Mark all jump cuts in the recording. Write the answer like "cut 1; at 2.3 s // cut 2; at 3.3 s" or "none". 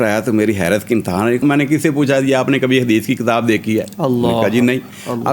cut 1; at 1.4 s